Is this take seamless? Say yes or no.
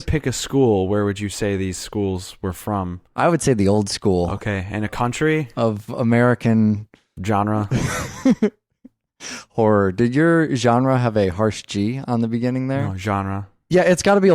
no